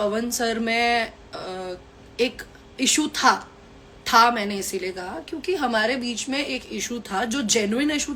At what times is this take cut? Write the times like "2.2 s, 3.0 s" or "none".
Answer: none